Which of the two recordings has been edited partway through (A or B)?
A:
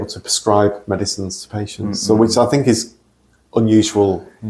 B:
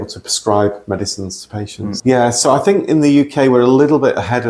B